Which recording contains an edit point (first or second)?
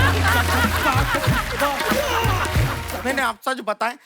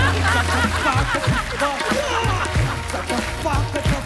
first